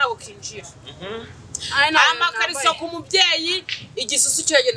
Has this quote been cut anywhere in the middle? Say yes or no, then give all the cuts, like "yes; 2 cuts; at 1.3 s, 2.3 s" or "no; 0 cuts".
no; 0 cuts